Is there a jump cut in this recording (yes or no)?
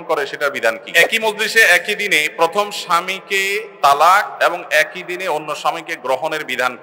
yes